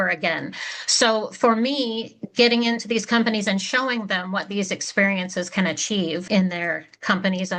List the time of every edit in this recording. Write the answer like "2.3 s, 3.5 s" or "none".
6.2 s